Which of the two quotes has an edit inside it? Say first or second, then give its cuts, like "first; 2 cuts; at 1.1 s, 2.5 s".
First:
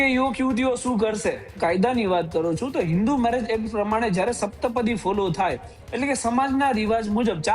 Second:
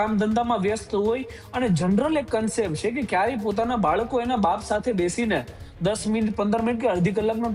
first; 1 cut; at 1.6 s